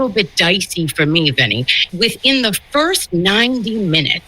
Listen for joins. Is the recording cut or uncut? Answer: cut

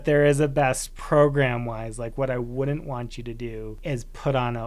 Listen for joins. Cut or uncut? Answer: cut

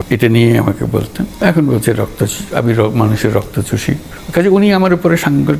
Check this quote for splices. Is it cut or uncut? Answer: cut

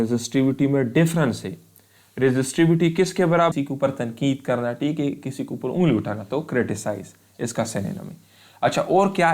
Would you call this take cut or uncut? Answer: cut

